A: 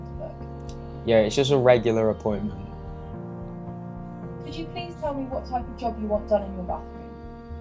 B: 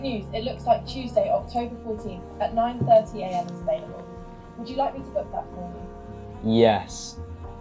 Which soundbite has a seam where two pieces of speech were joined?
A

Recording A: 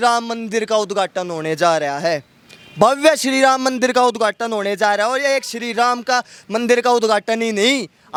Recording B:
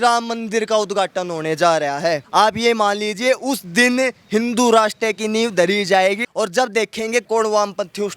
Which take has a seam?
B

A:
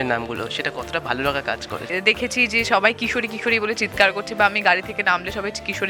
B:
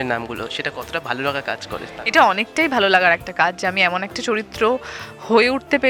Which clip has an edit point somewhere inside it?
A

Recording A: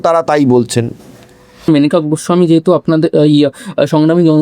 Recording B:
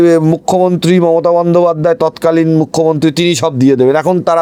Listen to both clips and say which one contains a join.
A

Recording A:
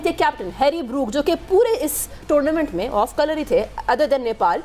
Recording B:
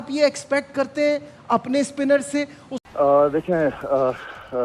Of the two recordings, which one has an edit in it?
B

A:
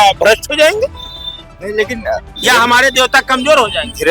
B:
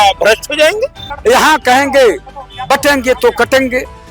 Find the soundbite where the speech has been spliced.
B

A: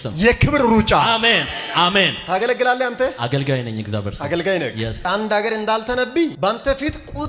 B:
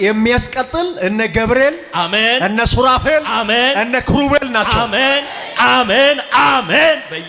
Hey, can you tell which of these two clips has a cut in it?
A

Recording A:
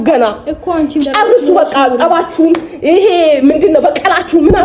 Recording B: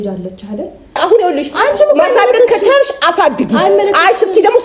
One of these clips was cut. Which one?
B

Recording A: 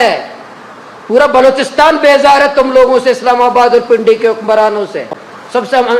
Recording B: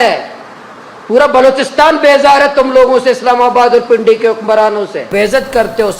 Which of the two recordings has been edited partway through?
B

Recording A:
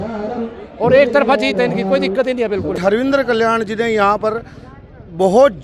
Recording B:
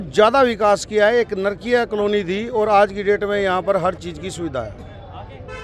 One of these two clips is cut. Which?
A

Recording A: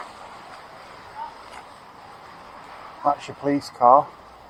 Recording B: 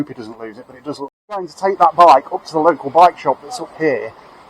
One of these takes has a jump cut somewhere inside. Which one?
B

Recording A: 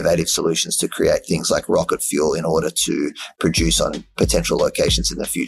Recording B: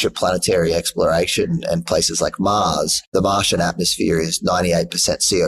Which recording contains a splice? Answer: B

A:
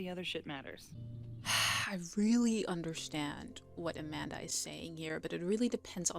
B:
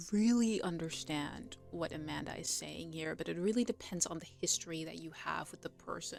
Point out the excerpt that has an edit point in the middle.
A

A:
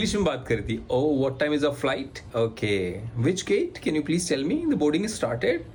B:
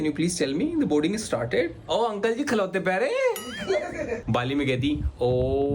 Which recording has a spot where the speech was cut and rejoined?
B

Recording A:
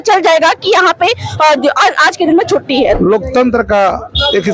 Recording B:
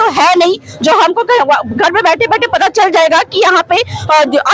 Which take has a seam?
A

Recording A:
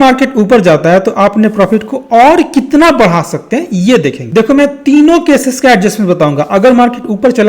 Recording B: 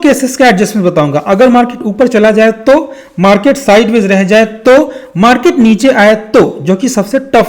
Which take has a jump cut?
A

